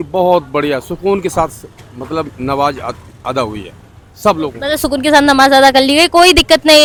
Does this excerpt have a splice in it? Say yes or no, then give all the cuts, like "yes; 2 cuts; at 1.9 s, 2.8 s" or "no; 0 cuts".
no; 0 cuts